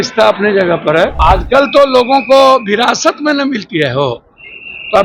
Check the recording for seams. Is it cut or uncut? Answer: cut